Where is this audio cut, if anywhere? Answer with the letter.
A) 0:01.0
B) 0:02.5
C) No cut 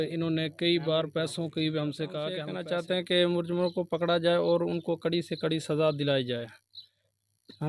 B